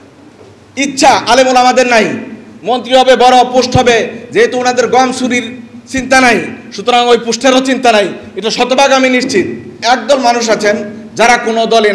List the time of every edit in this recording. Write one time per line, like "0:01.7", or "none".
0:09.8